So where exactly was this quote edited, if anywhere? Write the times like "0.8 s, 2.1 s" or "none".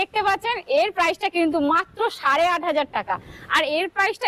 none